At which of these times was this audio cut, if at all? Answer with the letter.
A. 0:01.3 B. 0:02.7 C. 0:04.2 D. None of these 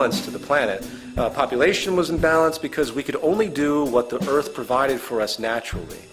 A